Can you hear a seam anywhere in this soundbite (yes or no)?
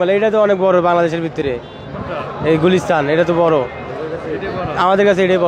no